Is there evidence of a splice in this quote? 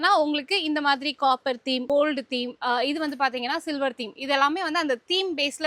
no; 0 cuts

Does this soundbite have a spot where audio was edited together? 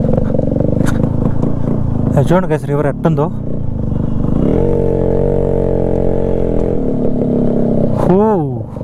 no; 0 cuts

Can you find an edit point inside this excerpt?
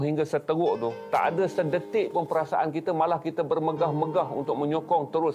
no; 0 cuts

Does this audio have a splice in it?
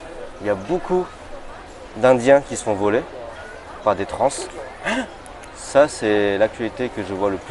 no; 0 cuts

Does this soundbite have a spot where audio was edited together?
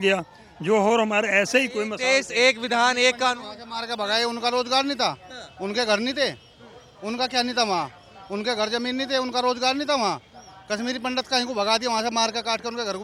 no; 0 cuts

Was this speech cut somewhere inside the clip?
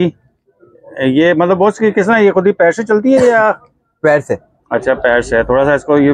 no; 0 cuts

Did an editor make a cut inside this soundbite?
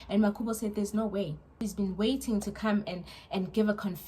yes; 1 cut; at 1.6 s

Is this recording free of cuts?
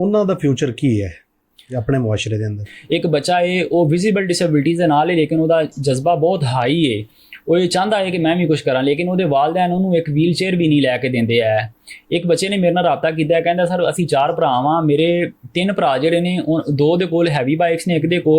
no; 1 cut; at 2.6 s

